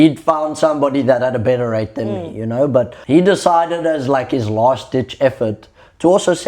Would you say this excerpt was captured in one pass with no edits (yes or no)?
no